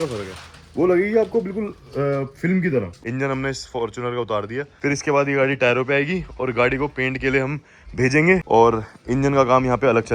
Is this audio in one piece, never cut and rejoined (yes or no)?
no